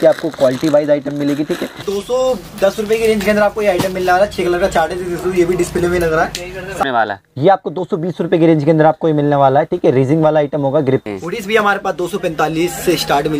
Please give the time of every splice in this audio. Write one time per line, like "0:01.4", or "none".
0:01.8
0:06.8
0:11.0